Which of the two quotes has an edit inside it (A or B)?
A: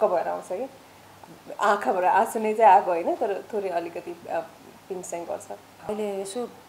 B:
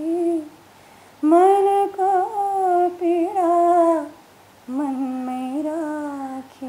A